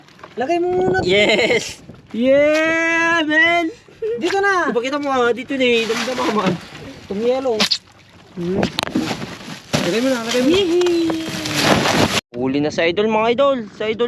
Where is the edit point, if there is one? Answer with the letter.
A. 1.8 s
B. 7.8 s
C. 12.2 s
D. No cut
C